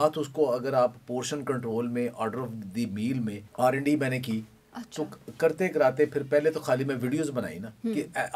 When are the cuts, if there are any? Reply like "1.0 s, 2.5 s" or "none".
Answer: 3.4 s